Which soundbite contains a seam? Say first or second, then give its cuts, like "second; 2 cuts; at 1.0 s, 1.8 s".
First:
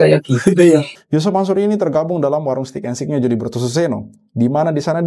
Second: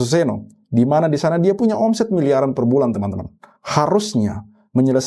first; 1 cut; at 1.0 s